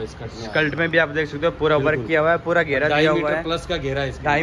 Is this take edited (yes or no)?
no